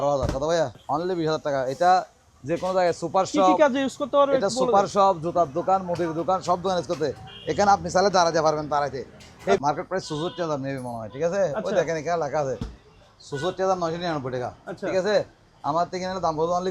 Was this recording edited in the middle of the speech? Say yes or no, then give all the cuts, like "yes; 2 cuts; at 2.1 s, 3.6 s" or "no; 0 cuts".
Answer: yes; 2 cuts; at 0.8 s, 9.6 s